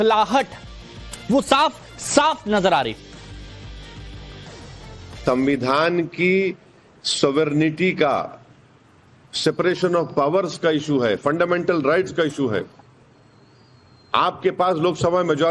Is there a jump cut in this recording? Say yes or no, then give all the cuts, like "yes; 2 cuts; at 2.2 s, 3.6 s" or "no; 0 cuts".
yes; 1 cut; at 11.0 s